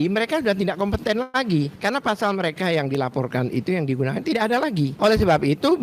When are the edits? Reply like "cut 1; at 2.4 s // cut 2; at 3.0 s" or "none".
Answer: cut 1; at 1.7 s // cut 2; at 4.9 s